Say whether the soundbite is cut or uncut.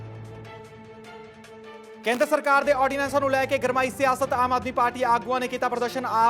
cut